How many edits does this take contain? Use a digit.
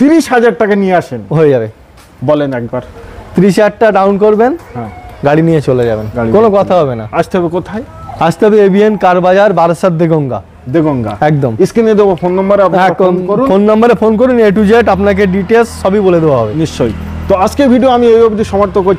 0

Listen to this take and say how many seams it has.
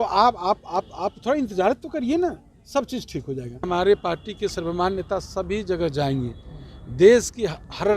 1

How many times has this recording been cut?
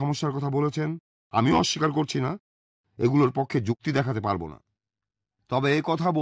0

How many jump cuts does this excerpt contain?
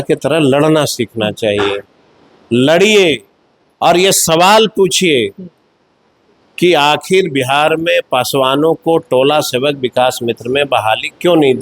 0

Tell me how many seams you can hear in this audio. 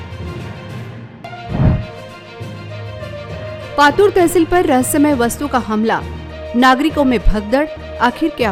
0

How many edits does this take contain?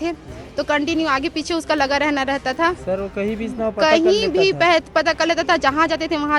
0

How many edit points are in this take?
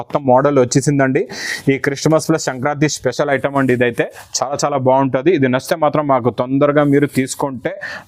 0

